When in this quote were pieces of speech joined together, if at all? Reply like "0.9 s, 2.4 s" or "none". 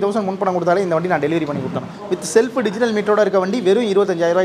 2.0 s